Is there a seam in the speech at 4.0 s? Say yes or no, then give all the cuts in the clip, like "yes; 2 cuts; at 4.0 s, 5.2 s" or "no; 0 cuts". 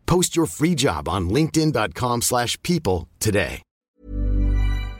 yes; 1 cut; at 4.0 s